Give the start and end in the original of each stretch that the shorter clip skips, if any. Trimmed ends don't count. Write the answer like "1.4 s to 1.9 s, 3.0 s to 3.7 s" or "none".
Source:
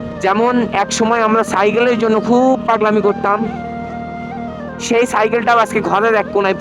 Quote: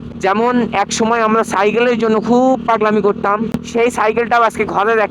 3.6 s to 4.7 s